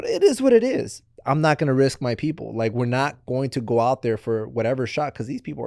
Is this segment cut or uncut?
uncut